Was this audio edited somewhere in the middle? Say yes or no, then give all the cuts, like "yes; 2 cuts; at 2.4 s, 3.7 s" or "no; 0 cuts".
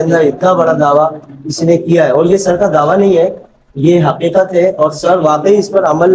no; 0 cuts